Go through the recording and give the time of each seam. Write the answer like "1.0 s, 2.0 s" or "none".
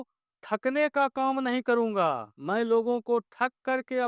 2.3 s